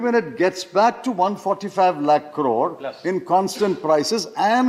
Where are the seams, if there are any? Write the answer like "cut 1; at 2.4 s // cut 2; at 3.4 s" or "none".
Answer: none